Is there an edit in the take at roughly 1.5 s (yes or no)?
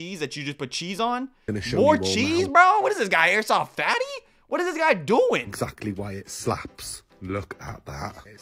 yes